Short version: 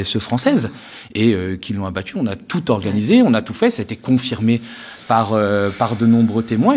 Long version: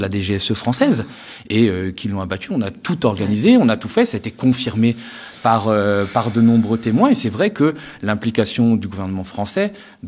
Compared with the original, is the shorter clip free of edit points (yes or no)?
yes